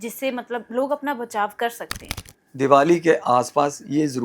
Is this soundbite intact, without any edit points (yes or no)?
no